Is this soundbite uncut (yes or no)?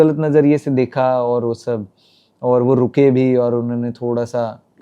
yes